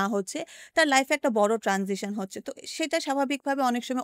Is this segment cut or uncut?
uncut